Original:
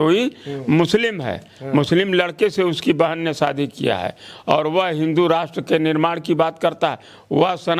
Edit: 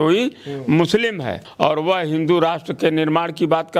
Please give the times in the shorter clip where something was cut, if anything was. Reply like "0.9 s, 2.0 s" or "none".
1.4 s